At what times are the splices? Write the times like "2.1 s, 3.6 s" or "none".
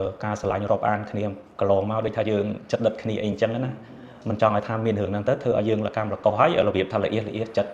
none